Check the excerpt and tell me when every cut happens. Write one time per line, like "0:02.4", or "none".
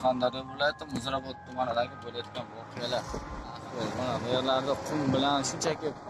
0:03.6